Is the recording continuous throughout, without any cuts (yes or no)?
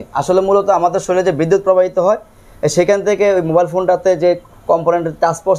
yes